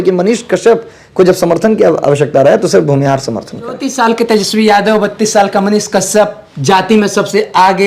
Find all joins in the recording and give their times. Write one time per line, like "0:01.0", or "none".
0:03.9